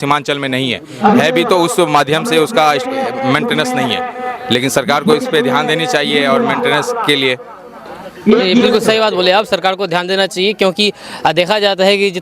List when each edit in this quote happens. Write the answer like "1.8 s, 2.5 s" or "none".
none